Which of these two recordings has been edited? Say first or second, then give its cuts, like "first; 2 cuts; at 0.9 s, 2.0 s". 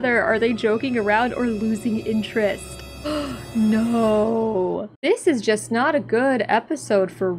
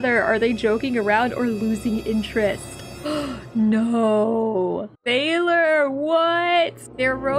first; 1 cut; at 4.9 s